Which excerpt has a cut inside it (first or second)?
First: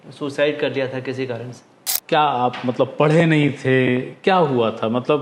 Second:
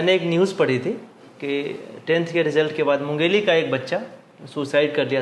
first